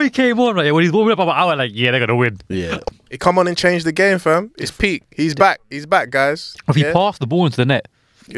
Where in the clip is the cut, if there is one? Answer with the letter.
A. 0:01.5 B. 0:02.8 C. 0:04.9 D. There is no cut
B